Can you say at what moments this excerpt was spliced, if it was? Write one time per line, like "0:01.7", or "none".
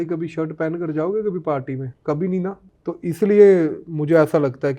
0:01.9
0:02.7